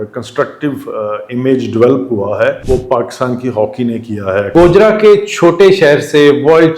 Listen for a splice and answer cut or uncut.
cut